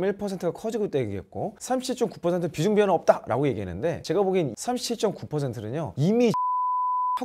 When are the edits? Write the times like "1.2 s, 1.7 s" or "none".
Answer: none